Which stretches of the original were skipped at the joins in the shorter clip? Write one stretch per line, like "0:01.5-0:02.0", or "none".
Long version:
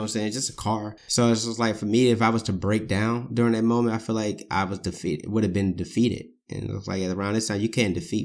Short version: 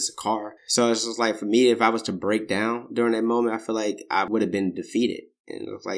0:04.7-0:05.3